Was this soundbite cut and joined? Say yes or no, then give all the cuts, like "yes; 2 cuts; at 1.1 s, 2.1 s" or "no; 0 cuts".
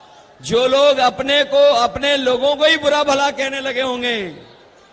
no; 0 cuts